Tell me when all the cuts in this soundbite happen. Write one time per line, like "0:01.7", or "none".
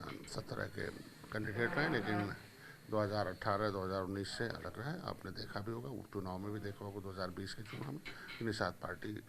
none